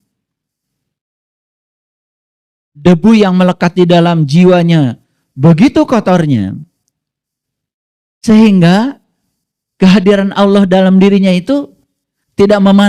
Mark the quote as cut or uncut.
uncut